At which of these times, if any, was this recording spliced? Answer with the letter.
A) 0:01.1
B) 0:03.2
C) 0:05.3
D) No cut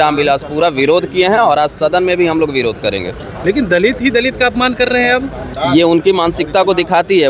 D